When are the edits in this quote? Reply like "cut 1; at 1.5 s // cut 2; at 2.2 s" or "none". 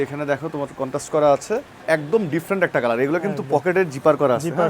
cut 1; at 1.7 s